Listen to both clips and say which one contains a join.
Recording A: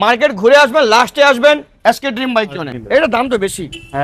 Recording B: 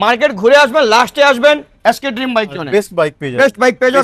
A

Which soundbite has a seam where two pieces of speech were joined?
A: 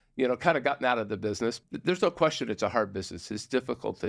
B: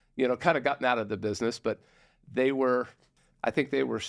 A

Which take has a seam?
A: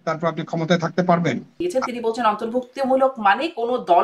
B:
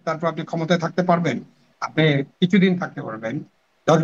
A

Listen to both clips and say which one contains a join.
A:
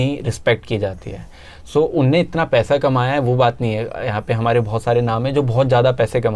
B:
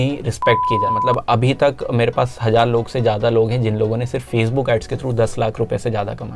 B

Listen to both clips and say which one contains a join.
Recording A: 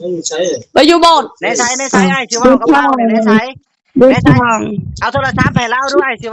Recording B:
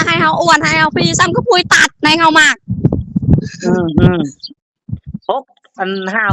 A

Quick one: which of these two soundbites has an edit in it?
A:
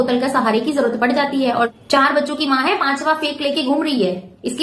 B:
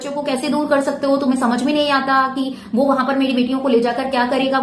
A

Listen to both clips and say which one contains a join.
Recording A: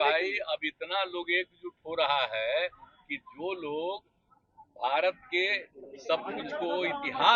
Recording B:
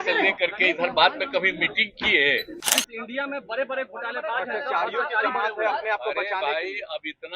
B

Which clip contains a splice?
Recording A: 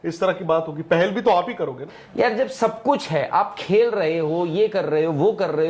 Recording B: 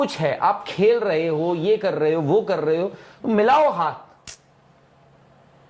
A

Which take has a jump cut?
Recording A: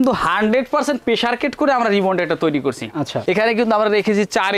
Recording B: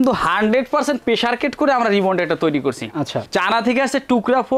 A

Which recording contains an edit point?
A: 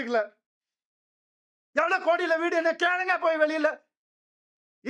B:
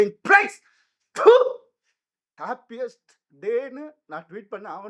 B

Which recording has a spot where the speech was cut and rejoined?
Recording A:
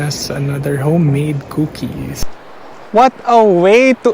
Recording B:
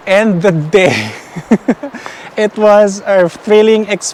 A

